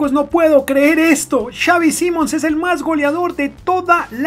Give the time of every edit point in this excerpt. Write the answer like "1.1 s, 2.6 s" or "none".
none